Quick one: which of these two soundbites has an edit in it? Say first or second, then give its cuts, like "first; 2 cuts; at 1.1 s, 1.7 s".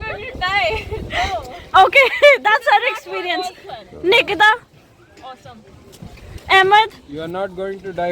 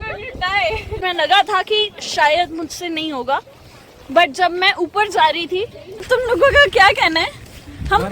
second; 2 cuts; at 1.0 s, 6.0 s